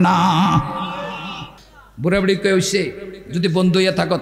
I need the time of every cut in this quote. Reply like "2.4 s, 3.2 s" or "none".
1.5 s

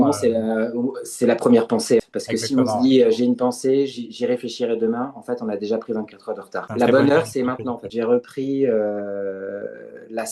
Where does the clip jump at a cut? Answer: 2.1 s, 6.7 s, 7.8 s

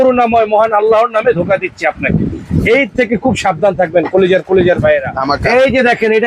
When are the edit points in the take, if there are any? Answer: 5.1 s

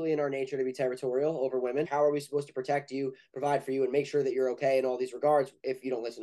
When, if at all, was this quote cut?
1.9 s

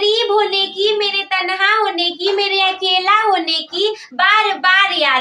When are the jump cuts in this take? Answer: none

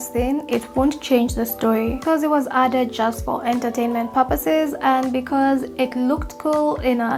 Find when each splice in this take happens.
none

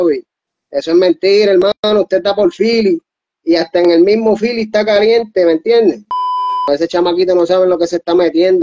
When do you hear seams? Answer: 6.7 s

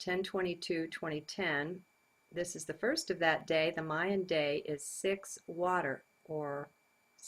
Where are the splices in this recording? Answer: 2.7 s

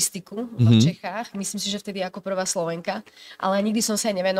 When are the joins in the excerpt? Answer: none

